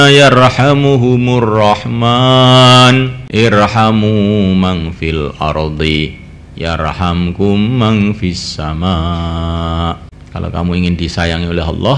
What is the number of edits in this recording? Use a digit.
2